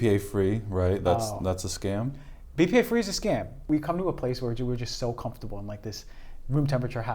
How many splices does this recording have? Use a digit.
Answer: 1